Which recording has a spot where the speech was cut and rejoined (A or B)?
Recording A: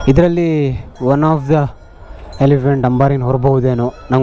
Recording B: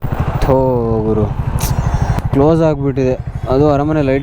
B